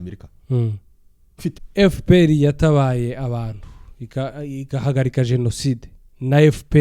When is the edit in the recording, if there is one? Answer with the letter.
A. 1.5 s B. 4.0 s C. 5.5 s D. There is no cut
A